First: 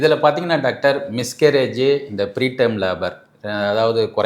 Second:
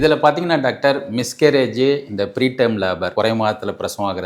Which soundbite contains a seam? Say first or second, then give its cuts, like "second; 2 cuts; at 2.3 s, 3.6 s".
second; 1 cut; at 3.1 s